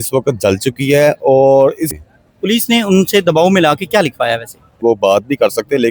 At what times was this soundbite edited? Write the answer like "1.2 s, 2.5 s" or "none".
1.9 s, 4.8 s